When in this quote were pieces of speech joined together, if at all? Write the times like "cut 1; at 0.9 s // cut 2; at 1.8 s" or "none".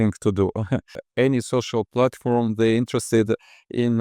cut 1; at 1.0 s